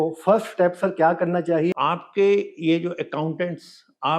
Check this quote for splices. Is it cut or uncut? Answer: cut